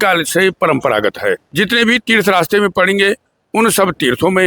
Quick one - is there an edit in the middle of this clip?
yes; 1 cut; at 1.5 s

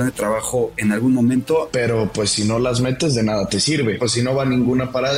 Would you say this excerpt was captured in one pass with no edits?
no; 2 cuts; at 1.7 s, 4.0 s

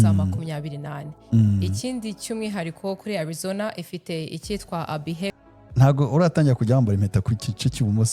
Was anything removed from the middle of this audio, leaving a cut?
yes; 1 cut; at 5.3 s

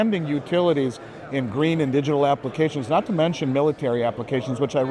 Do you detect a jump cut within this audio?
no; 0 cuts

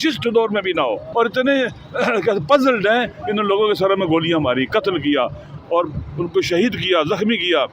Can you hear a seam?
yes; 1 cut; at 1.0 s

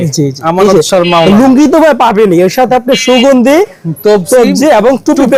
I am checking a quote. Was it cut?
no; 0 cuts

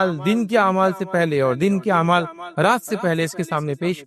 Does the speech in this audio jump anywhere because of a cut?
no; 0 cuts

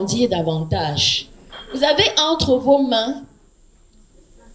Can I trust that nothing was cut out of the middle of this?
yes; 0 cuts

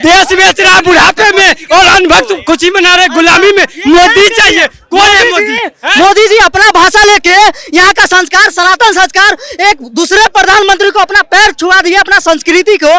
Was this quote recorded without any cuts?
yes; 0 cuts

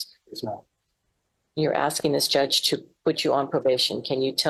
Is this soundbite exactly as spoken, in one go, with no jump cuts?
yes; 0 cuts

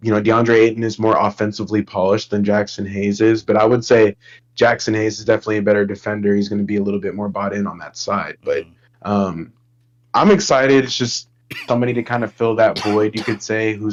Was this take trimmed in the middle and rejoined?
no; 0 cuts

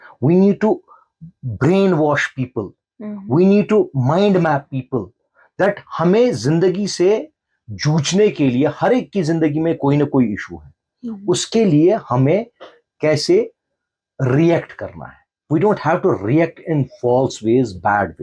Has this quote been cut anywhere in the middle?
no; 0 cuts

